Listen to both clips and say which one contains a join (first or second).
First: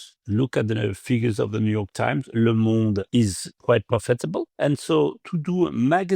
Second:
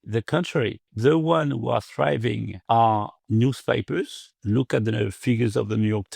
first